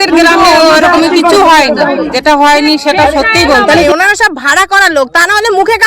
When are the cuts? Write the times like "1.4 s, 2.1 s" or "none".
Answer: 2.1 s, 3.8 s